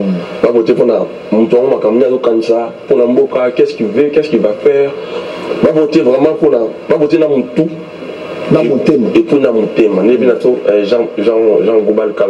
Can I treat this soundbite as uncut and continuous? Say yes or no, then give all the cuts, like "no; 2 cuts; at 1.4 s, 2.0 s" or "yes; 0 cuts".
yes; 0 cuts